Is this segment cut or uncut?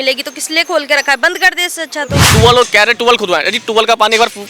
cut